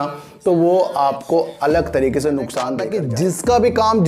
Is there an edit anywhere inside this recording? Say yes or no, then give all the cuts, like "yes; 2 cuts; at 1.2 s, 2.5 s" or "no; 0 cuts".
yes; 1 cut; at 2.8 s